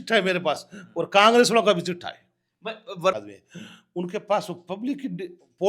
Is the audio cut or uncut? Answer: cut